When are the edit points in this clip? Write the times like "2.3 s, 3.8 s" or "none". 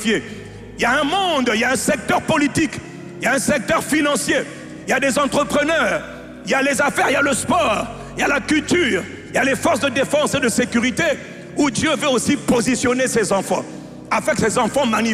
none

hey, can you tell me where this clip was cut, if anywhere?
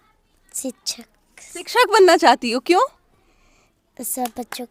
none

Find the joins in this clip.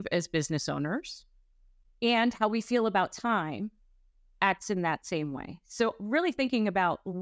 none

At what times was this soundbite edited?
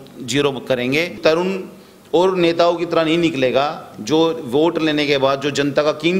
1.2 s

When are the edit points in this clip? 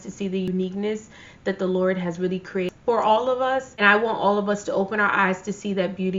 3.7 s

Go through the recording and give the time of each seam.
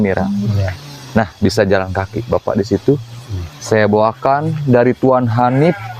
none

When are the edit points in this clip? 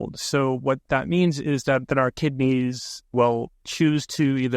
3.3 s

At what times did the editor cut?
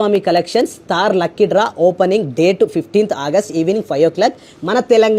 none

